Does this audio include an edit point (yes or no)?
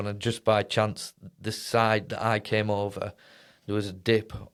no